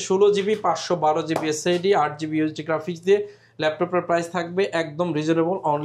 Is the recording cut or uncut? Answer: uncut